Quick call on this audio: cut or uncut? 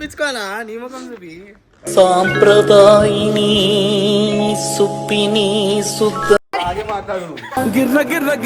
cut